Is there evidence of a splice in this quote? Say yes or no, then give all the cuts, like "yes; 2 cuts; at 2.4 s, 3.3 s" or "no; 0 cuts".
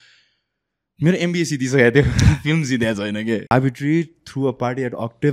yes; 1 cut; at 3.5 s